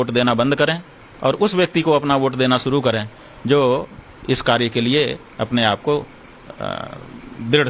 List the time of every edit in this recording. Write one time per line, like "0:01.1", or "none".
0:03.8